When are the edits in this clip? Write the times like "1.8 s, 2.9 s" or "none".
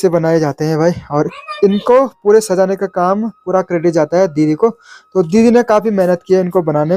none